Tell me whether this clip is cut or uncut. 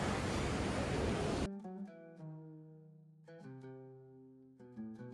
uncut